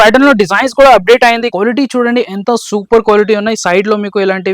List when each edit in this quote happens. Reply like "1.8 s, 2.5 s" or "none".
1.5 s